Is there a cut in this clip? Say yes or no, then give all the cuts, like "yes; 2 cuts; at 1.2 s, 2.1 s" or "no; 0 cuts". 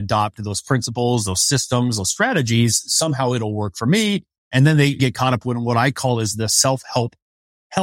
yes; 1 cut; at 5.0 s